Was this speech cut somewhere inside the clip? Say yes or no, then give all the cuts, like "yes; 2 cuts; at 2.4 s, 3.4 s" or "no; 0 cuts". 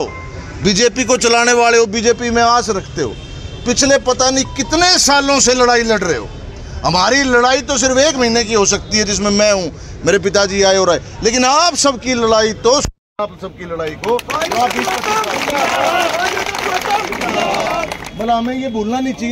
no; 0 cuts